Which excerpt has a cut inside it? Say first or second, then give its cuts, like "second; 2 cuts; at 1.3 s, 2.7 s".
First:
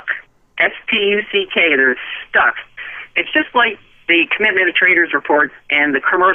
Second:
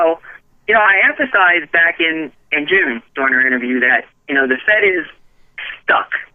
second; 1 cut; at 3.4 s